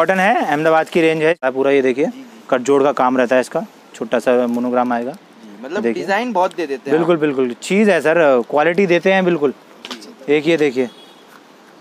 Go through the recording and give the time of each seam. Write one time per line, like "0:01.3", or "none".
0:01.4